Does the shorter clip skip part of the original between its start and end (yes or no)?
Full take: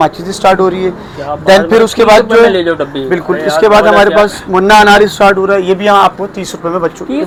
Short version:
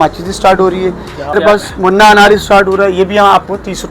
yes